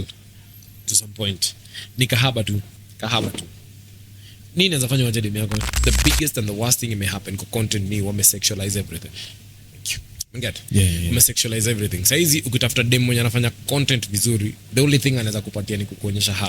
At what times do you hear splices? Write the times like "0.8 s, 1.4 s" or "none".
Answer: 2.8 s, 5.7 s